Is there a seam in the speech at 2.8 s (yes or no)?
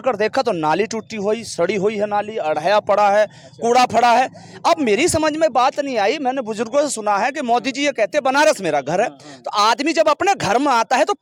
no